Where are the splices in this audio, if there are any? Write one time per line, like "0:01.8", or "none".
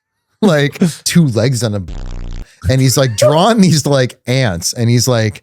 0:01.0